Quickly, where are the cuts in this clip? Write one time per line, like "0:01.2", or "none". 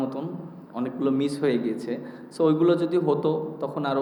none